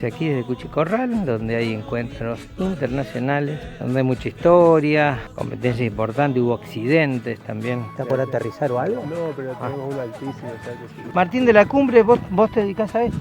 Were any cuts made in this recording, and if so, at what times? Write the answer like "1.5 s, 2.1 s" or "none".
3.7 s, 8.0 s, 11.0 s